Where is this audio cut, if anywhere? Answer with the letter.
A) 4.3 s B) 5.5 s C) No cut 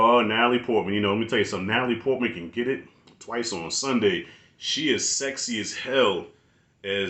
C